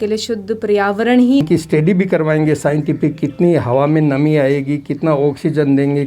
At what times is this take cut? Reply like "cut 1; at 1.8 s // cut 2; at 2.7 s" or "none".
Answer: cut 1; at 1.4 s